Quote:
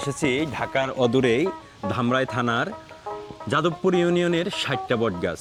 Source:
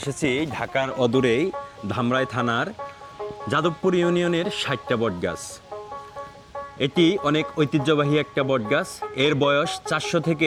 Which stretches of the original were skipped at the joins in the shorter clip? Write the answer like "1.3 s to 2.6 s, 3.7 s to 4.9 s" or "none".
none